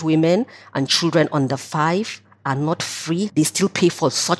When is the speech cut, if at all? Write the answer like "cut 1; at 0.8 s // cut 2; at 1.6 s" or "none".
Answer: cut 1; at 3.3 s